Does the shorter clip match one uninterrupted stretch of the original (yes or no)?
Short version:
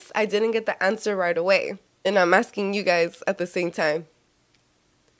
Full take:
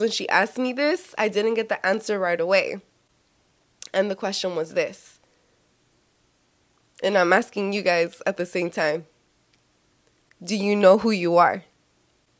no